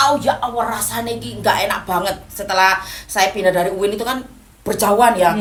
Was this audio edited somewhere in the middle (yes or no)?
no